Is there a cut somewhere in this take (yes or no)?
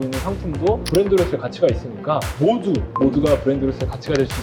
yes